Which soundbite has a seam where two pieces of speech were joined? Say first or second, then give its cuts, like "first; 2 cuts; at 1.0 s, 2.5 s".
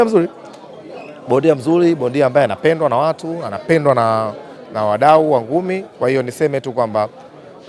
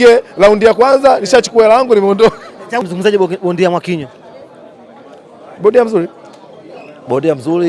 second; 1 cut; at 2.8 s